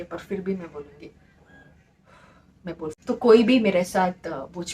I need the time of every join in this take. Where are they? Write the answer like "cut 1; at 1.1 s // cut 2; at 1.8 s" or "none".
cut 1; at 3.3 s